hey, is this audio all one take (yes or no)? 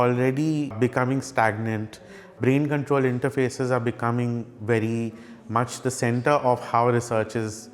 no